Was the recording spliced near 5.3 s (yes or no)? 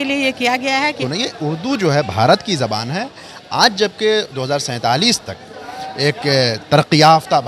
no